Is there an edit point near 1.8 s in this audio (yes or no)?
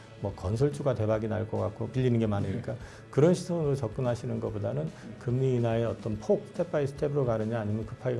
yes